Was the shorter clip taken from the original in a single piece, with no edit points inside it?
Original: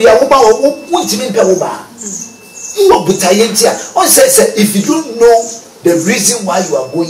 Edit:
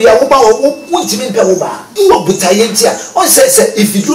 no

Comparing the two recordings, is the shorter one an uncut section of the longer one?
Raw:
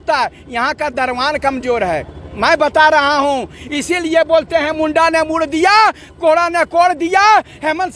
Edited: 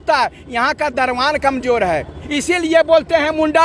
no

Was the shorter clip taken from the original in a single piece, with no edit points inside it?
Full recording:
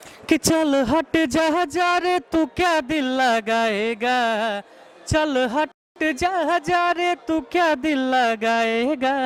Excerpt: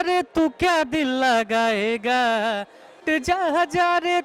no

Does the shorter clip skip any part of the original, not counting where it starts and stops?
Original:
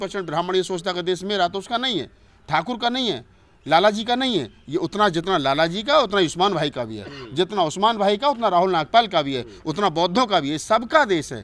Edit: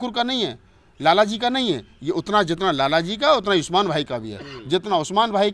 no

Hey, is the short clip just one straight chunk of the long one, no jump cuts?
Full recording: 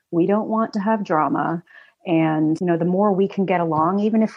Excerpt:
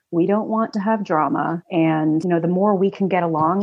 no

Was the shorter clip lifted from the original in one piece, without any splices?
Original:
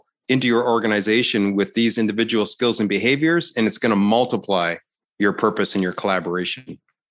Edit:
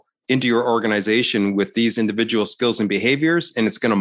yes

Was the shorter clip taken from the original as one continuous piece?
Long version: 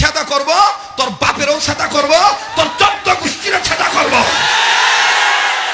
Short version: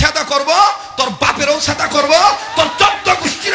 yes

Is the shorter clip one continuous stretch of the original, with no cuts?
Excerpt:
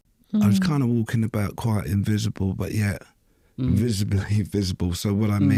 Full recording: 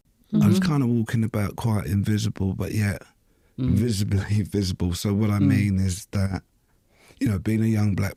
yes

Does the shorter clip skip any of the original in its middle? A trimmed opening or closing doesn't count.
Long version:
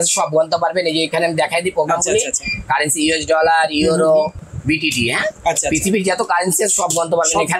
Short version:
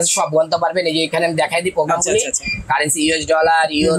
no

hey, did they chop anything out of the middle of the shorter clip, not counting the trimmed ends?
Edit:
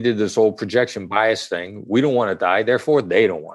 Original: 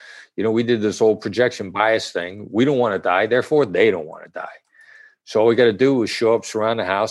no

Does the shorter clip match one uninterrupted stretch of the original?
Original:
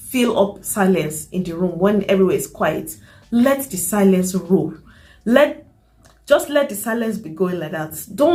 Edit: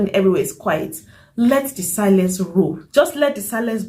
no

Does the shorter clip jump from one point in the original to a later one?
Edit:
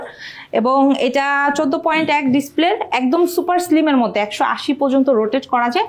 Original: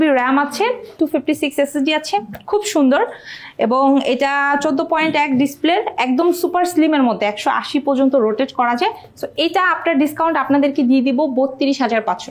no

